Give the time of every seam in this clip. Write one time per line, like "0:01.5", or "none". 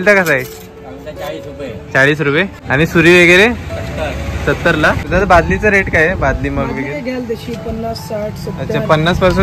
0:02.6
0:05.0